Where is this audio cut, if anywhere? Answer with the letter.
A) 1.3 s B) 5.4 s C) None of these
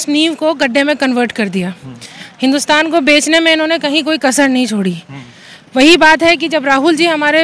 C